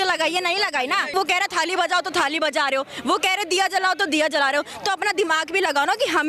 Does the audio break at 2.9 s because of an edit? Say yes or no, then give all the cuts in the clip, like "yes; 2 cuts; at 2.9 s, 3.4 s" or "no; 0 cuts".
no; 1 cut; at 1.1 s